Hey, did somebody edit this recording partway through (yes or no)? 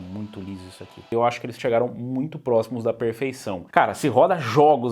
yes